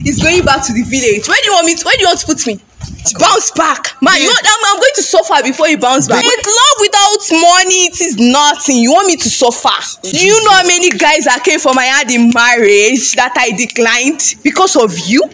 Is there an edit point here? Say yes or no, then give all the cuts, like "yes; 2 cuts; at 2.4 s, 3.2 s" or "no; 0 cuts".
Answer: yes; 3 cuts; at 3.1 s, 6.2 s, 9.9 s